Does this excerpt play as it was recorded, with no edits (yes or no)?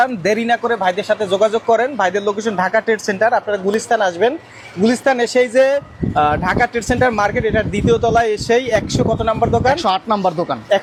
yes